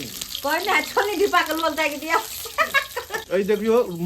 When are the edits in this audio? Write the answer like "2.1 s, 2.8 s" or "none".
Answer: 3.2 s